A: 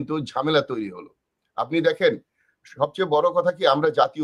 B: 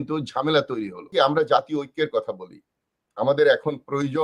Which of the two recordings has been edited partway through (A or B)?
B